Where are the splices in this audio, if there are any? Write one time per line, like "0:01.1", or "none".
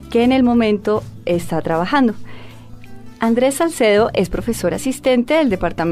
0:04.1